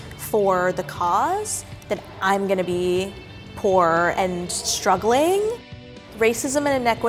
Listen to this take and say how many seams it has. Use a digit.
2